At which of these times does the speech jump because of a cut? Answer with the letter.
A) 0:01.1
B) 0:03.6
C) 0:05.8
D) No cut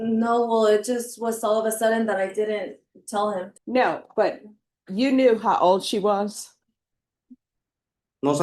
B